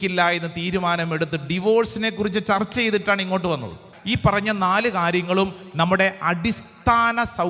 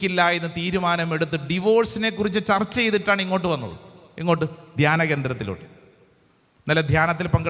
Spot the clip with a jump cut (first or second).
first